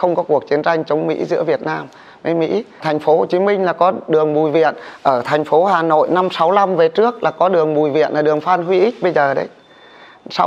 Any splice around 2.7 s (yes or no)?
yes